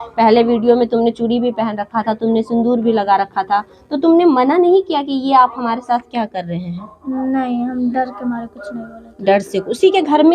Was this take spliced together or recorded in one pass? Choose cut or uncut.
uncut